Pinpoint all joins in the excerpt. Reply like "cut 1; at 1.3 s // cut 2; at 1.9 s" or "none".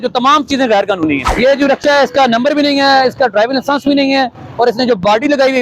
cut 1; at 1.3 s